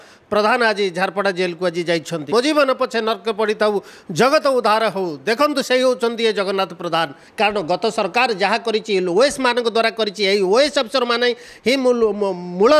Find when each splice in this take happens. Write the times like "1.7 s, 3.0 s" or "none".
2.3 s, 7.2 s